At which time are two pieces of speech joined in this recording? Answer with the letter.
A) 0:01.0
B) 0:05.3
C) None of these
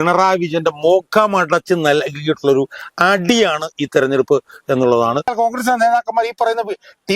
B